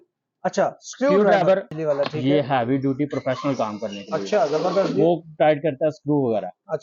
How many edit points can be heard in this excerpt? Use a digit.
1